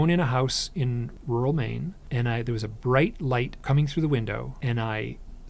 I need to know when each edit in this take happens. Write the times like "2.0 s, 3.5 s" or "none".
1.1 s, 2.0 s, 3.6 s, 4.5 s